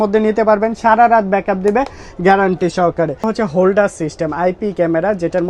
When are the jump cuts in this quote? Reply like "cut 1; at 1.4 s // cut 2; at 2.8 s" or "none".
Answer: cut 1; at 3.3 s